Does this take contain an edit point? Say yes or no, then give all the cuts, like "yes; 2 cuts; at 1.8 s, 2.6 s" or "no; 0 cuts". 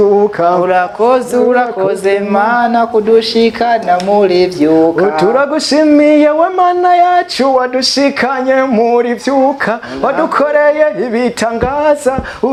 no; 0 cuts